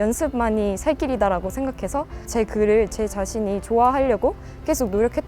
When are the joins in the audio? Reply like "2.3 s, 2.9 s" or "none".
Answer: 2.2 s